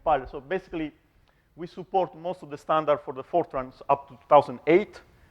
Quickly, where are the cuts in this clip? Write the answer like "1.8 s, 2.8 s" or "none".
2.5 s